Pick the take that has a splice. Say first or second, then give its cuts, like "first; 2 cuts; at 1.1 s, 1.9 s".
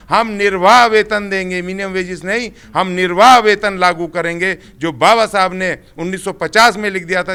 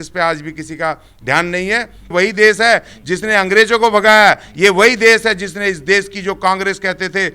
second; 1 cut; at 2.1 s